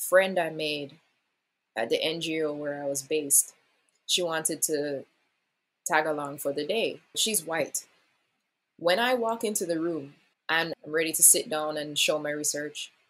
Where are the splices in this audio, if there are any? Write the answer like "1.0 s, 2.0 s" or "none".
none